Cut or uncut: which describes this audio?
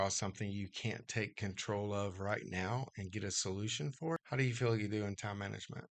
cut